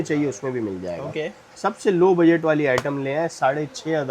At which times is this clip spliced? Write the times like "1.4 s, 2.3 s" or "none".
none